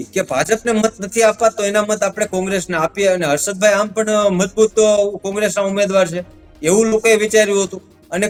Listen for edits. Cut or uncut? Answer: uncut